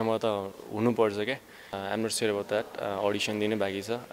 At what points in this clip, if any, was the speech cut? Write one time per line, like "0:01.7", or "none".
0:01.8